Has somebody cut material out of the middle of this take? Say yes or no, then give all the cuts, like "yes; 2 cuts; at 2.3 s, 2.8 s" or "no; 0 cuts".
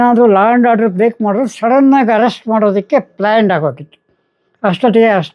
no; 0 cuts